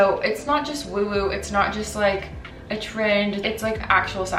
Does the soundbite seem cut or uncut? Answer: cut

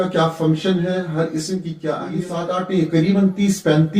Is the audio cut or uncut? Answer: cut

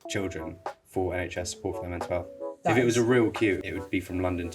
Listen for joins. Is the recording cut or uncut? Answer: cut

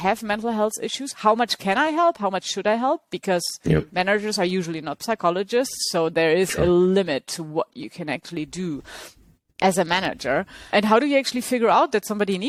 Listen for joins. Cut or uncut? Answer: uncut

